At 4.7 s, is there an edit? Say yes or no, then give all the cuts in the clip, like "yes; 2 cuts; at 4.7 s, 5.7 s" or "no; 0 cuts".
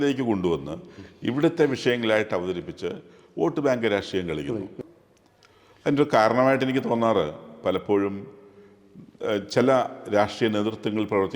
yes; 1 cut; at 4.7 s